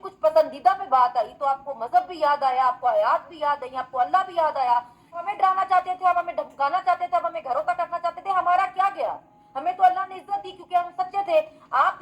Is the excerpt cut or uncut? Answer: cut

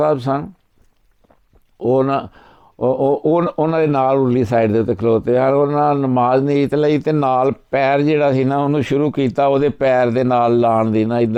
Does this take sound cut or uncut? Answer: uncut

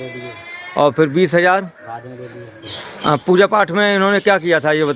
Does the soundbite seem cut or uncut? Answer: cut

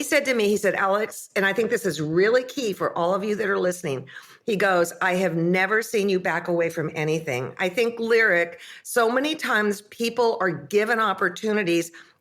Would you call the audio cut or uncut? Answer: uncut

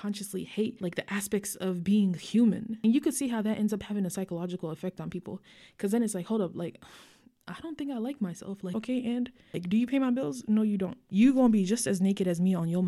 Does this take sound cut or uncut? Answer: cut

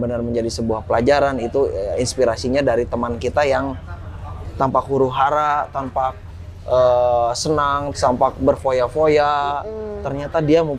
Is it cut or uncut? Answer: uncut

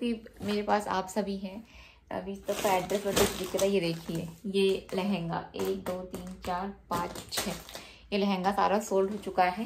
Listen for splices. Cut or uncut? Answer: uncut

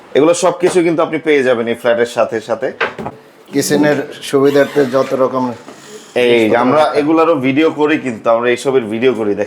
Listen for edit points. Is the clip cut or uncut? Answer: cut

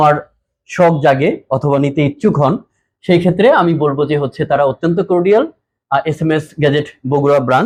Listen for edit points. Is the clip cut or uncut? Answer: uncut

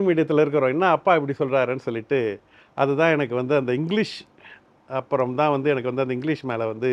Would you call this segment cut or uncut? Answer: uncut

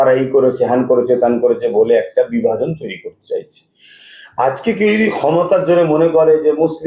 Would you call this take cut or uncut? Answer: uncut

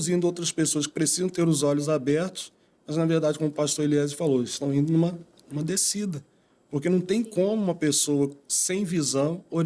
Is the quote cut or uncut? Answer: uncut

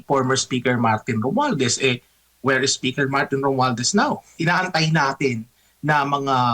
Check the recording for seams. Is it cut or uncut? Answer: cut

